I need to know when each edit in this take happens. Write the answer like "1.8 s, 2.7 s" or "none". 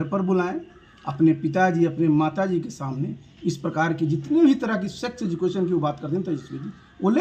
none